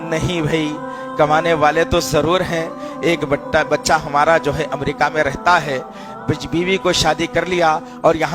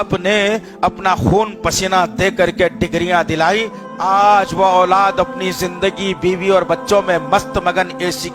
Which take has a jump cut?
second; 1 cut; at 3.8 s

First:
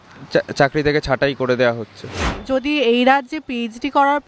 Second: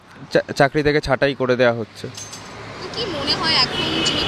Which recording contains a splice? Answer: first; 1 cut; at 2.3 s

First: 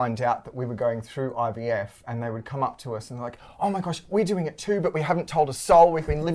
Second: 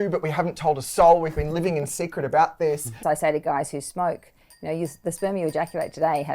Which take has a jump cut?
second; 1 cut; at 3.0 s

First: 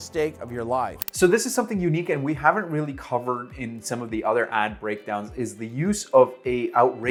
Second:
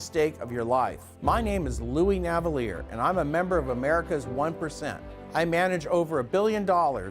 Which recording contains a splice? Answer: second; 2 cuts; at 1.0 s, 5.1 s

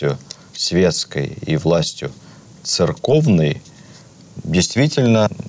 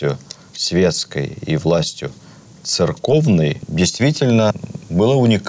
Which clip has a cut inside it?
second; 1 cut; at 3.6 s

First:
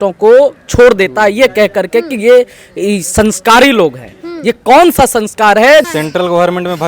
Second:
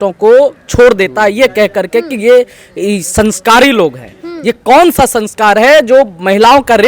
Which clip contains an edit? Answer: first; 1 cut; at 5.9 s

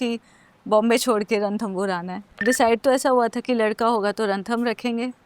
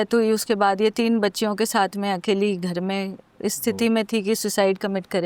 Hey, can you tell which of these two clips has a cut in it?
first; 1 cut; at 2.4 s

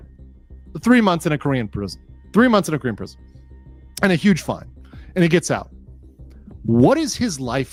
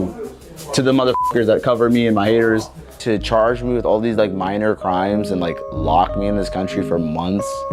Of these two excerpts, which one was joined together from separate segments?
second; 1 cut; at 3.0 s

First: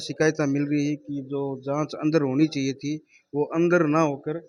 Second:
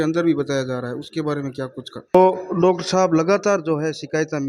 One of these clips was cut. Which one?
second; 1 cut; at 2.2 s

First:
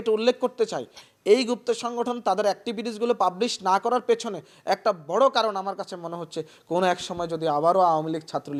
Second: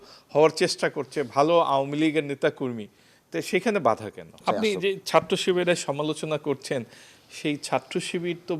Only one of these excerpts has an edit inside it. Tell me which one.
second; 1 cut; at 4.3 s

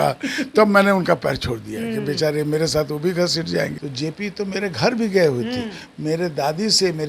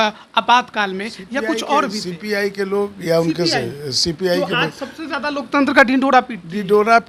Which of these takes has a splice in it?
first; 1 cut; at 3.8 s

